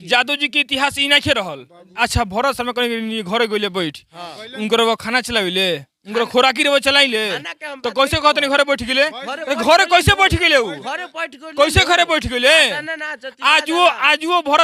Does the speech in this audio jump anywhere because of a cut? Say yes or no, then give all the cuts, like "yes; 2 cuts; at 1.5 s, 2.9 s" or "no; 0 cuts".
yes; 1 cut; at 1.9 s